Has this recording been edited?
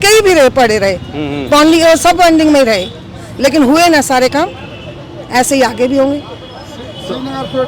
no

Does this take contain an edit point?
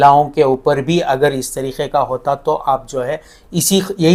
no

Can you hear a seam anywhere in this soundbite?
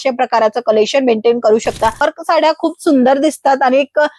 yes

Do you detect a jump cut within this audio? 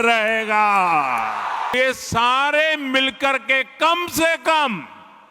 yes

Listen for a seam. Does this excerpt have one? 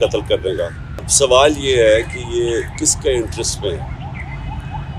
yes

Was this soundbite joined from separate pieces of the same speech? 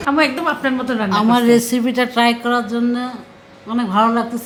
no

